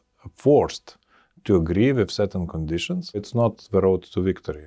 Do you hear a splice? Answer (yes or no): no